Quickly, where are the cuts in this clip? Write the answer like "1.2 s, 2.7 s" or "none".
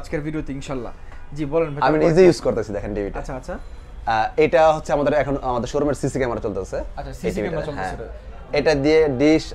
none